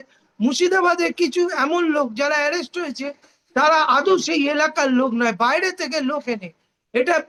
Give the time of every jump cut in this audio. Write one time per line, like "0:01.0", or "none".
none